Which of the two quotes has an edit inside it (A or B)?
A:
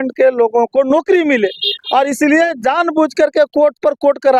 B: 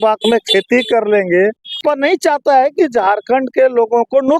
B